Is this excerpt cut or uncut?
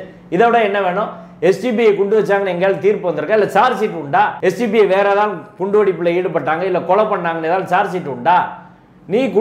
uncut